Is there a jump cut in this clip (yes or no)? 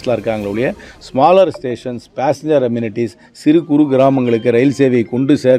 no